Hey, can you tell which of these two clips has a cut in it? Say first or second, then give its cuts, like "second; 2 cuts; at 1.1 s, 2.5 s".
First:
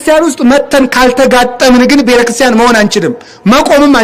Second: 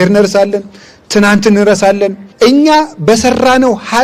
second; 1 cut; at 2.2 s